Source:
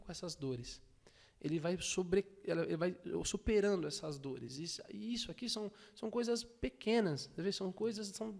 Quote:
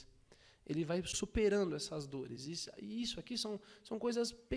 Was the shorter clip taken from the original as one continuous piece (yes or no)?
no